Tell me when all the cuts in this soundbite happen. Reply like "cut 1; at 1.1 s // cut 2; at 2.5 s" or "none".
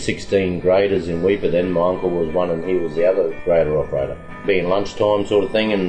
cut 1; at 3.4 s // cut 2; at 4.4 s